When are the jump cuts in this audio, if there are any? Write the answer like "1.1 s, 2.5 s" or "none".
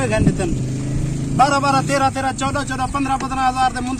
none